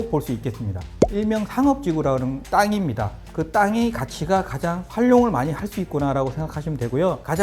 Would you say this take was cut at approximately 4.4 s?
no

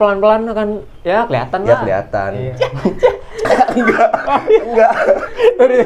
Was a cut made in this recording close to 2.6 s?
yes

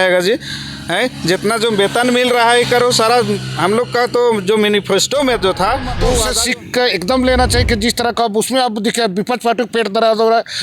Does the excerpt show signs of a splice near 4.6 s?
no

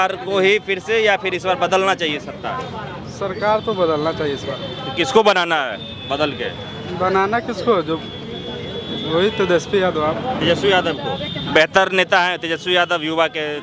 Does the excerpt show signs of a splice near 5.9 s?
no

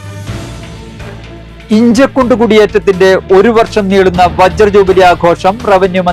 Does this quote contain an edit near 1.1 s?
yes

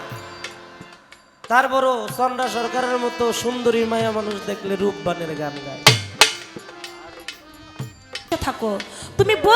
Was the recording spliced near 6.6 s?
no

